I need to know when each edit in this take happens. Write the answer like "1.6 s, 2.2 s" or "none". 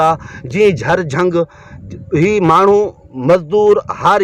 none